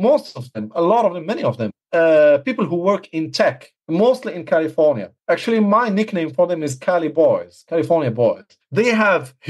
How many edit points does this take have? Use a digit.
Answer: 4